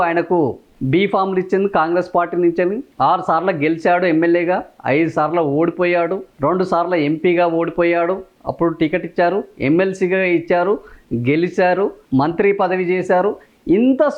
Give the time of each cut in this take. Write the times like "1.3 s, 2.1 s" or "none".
none

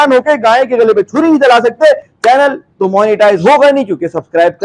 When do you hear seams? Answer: 2.1 s

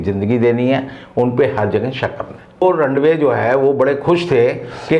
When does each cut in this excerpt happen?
2.6 s

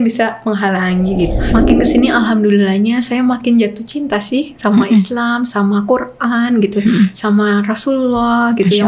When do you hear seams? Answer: 1.4 s

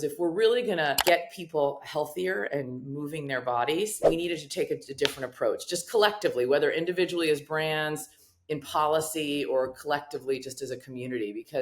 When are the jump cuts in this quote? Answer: 1.0 s, 4.0 s

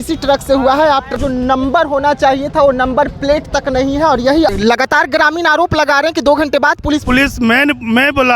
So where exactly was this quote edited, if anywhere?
1.2 s, 4.5 s, 7.0 s

